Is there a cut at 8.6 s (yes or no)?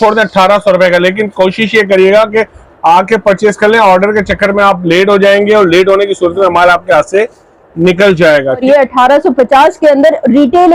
yes